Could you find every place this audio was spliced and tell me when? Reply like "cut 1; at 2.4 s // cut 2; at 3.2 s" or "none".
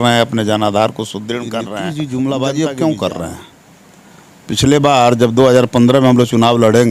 cut 1; at 1.8 s